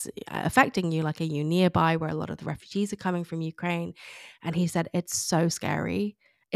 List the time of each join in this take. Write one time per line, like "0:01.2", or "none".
none